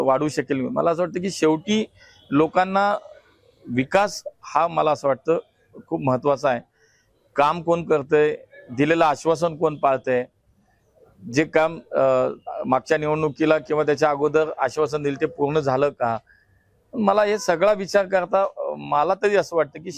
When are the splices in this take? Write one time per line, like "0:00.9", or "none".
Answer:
none